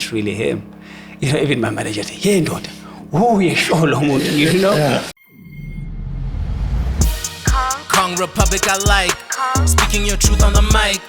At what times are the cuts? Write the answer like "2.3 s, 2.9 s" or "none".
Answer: 5.2 s